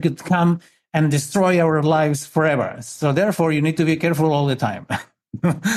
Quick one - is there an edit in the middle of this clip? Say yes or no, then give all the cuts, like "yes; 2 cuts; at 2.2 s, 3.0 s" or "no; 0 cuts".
no; 0 cuts